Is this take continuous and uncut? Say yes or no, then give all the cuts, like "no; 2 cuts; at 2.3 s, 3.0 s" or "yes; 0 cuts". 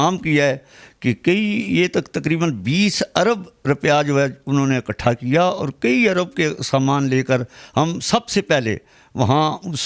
yes; 0 cuts